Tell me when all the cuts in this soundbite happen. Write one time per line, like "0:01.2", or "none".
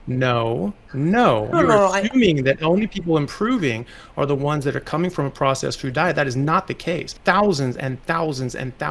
0:01.5
0:07.1